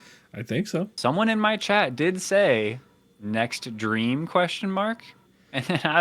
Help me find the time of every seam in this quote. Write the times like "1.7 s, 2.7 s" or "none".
0.9 s